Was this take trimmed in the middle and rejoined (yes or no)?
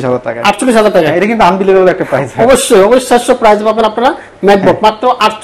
no